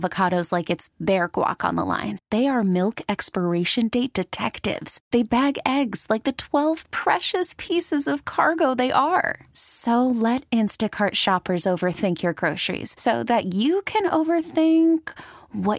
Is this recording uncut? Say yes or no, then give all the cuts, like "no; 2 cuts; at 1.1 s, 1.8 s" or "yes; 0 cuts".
yes; 0 cuts